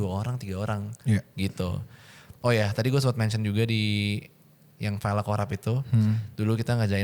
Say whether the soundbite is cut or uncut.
uncut